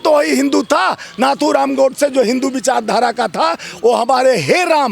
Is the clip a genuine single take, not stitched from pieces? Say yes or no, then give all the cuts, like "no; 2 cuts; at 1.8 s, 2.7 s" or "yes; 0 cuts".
yes; 0 cuts